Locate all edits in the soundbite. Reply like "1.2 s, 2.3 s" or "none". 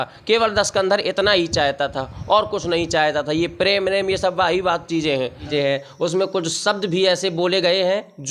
5.5 s